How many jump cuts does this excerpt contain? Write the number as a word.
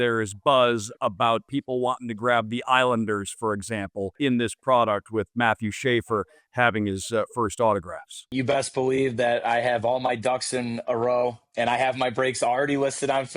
three